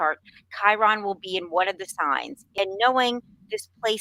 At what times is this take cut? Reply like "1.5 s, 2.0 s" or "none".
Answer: 2.4 s